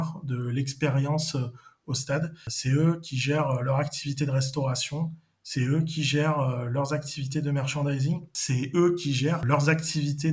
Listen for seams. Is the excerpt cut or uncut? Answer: cut